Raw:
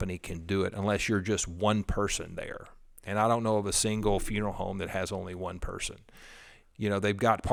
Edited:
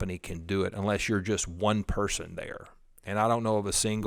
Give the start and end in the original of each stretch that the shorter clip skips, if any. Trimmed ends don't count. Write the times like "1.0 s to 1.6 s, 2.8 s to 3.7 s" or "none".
none

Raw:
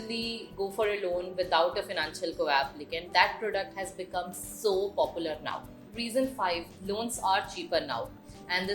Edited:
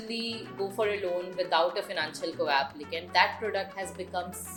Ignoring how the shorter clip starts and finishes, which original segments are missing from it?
none

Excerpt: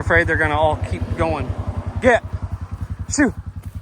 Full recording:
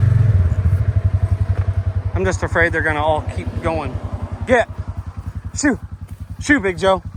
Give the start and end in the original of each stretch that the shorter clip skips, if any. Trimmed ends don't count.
none

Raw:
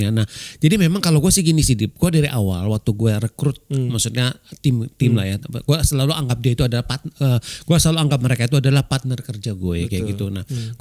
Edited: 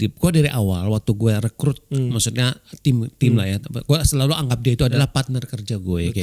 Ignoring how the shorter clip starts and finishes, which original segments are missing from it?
6.8 s to 8.7 s

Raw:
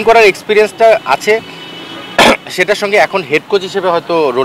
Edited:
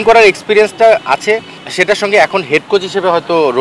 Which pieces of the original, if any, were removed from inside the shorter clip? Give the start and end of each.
1.7 s to 2.5 s

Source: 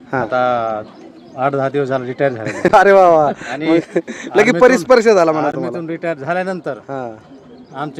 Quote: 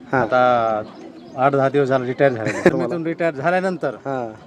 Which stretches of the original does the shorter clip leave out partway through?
2.6 s to 5.4 s

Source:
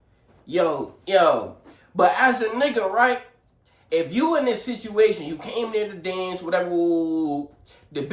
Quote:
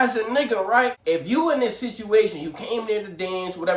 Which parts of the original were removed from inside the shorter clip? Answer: 3.2 s to 3.8 s

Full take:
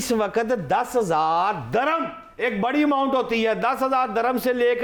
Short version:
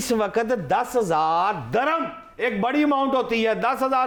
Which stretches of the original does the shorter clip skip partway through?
none

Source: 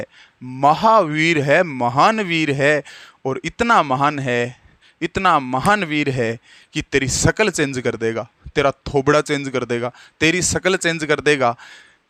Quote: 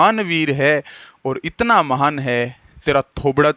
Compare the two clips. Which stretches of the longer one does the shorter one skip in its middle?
4.7 s to 8.4 s

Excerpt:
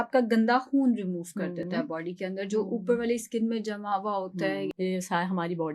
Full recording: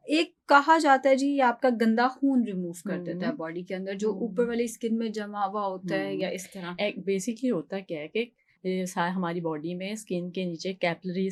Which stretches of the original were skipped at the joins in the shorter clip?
6.2 s to 8.5 s

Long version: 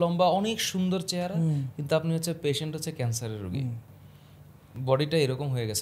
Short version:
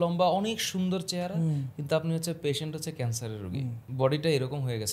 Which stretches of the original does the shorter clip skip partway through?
3.8 s to 4.7 s

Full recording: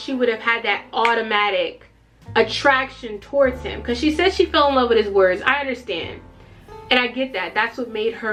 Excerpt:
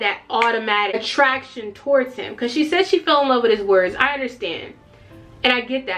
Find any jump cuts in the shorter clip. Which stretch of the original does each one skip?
1.6 s to 2.4 s

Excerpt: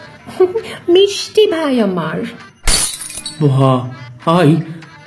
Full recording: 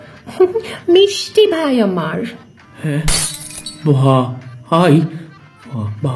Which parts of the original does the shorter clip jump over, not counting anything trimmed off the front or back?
2.8 s to 3.2 s

